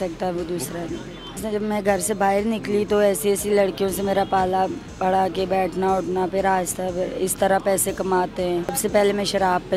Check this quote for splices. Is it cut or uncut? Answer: cut